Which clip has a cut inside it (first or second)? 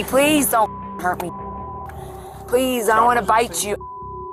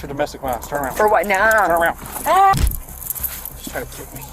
second